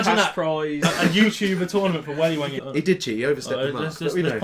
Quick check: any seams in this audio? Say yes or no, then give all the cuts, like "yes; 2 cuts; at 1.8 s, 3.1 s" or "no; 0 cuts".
yes; 1 cut; at 2.6 s